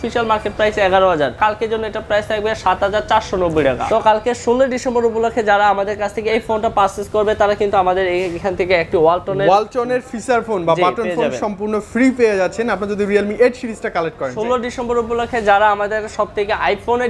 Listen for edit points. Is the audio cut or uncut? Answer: cut